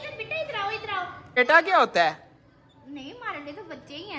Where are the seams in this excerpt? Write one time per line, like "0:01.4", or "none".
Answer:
0:01.4